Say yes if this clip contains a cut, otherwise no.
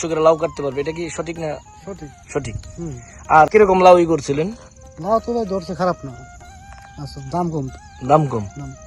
yes